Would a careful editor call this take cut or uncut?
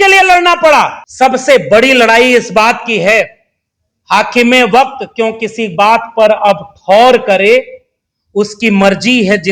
cut